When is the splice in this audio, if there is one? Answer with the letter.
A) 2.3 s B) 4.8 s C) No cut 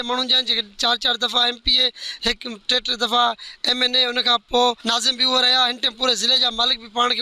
B